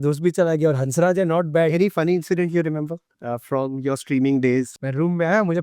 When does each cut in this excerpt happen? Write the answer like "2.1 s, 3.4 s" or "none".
1.7 s, 4.8 s